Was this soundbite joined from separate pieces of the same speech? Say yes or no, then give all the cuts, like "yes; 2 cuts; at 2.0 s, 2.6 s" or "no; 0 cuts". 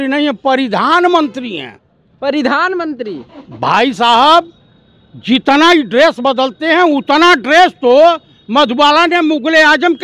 no; 0 cuts